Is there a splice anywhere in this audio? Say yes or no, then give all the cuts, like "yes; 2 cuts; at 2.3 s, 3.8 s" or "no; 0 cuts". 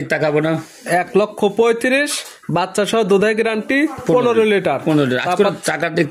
no; 0 cuts